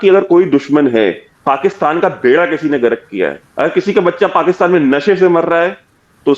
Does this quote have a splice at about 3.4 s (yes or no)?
yes